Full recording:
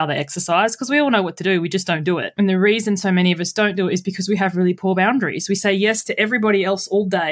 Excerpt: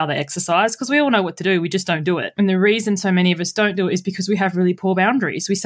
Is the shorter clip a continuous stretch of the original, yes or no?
yes